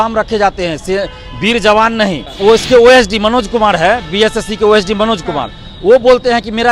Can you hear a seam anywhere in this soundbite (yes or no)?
yes